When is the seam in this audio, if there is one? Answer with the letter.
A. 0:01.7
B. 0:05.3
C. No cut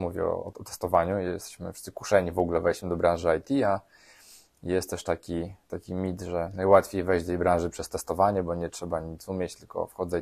C